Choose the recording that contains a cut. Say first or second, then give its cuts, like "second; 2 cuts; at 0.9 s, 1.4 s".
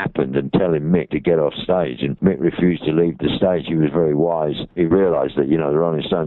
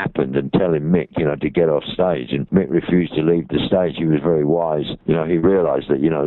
first; 2 cuts; at 1.1 s, 4.7 s